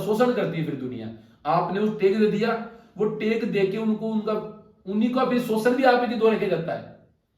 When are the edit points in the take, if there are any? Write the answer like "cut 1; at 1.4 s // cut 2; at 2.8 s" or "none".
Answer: none